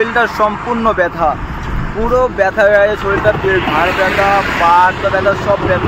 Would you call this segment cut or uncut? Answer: uncut